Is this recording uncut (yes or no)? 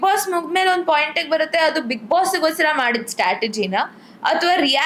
yes